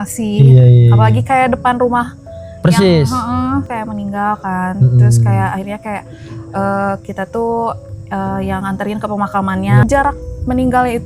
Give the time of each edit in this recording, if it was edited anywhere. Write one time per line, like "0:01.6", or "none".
0:03.7
0:09.8